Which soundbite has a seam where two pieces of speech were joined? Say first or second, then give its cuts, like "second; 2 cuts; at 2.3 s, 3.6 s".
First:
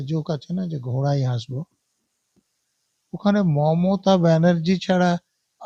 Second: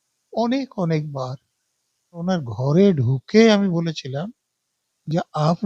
second; 1 cut; at 2.2 s